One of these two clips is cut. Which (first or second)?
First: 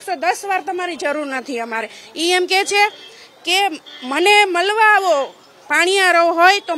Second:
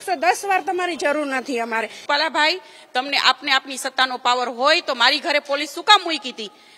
second